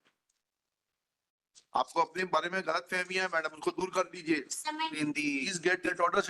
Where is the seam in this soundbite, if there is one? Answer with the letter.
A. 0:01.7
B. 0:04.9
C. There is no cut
B